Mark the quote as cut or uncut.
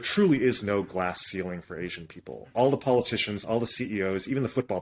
uncut